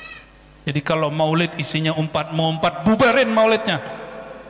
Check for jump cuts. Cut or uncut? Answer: uncut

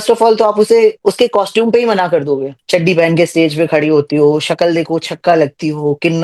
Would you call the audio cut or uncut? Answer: cut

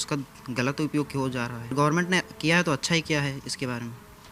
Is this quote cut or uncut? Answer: cut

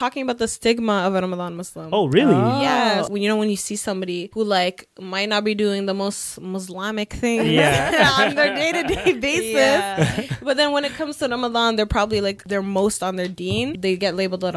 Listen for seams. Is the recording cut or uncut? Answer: cut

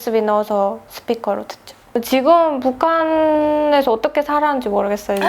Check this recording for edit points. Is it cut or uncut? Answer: cut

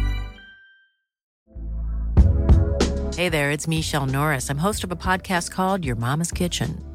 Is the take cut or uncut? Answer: cut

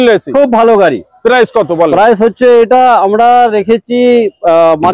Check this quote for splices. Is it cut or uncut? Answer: uncut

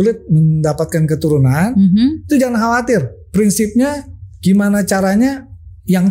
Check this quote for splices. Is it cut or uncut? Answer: uncut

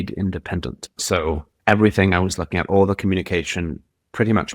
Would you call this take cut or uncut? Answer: cut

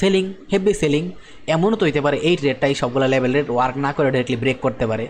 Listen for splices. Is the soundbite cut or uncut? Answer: uncut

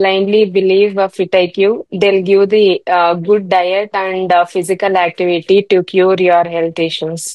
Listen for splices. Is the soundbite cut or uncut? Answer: uncut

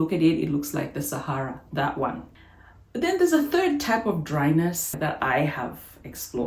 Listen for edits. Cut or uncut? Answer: cut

